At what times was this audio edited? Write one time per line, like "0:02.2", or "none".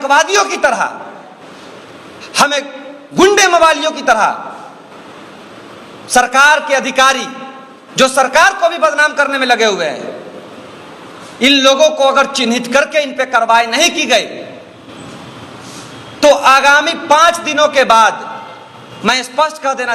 none